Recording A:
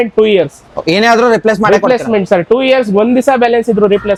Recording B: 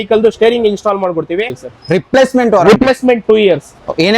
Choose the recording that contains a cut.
B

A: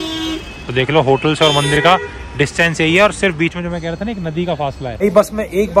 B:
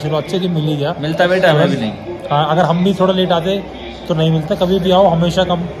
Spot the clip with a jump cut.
A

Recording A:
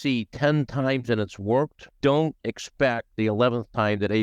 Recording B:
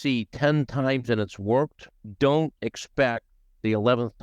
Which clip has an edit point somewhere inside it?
A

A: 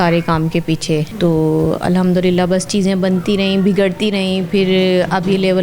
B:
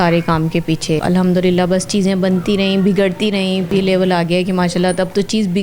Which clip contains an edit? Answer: B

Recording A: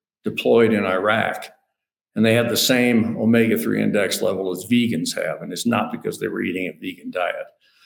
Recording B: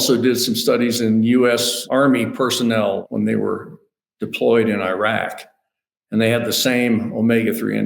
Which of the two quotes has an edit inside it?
B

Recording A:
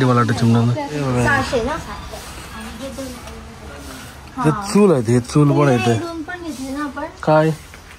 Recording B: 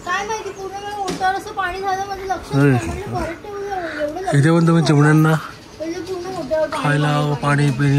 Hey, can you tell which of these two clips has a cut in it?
A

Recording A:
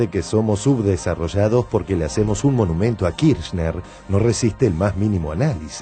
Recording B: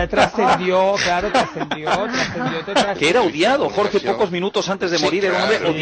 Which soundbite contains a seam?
B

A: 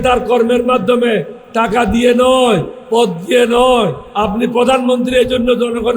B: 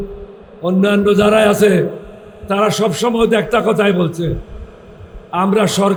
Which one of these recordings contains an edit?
A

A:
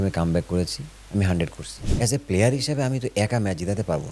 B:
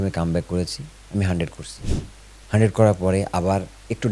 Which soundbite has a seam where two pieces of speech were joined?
A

